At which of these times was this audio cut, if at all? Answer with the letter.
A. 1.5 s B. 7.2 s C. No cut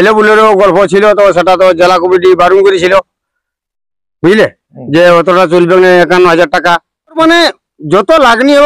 B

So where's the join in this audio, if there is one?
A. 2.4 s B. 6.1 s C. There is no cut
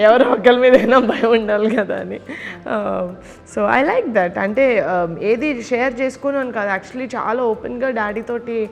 C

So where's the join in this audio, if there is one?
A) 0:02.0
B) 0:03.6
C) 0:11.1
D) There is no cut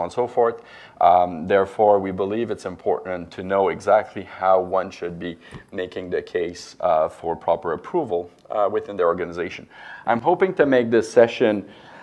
A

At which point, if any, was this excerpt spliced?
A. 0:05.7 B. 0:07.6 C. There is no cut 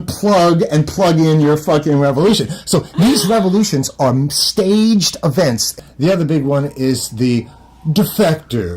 A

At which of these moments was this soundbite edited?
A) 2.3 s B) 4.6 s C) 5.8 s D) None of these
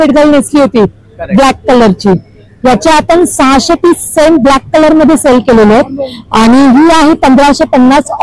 D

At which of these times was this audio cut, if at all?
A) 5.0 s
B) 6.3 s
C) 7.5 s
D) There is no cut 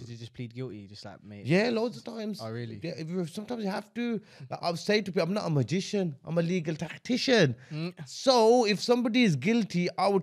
D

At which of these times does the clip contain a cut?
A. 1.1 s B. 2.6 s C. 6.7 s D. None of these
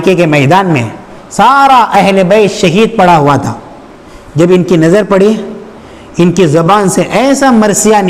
D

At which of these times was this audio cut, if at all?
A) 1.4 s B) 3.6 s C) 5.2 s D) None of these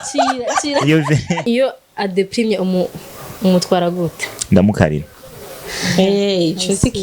A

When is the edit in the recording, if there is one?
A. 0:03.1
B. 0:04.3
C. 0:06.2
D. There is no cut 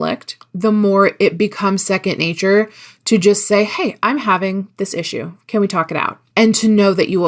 C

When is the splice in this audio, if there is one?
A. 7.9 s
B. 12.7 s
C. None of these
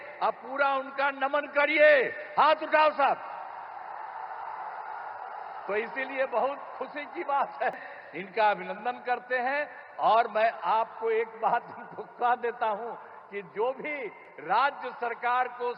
A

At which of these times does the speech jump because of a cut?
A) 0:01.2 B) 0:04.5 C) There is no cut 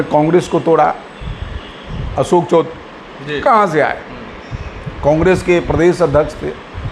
C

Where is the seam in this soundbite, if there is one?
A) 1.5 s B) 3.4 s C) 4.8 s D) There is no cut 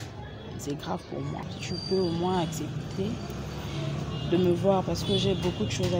A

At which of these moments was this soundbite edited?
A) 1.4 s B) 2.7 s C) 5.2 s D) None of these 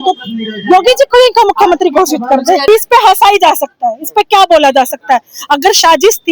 B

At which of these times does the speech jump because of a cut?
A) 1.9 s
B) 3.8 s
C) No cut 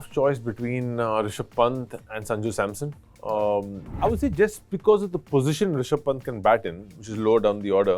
B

